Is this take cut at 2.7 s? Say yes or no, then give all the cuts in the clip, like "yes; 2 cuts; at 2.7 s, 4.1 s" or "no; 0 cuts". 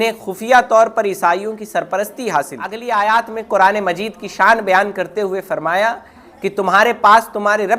yes; 1 cut; at 2.7 s